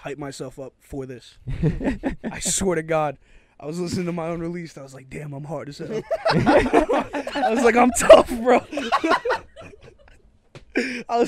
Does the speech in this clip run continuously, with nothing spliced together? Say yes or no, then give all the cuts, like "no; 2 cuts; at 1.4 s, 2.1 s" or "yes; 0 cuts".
yes; 0 cuts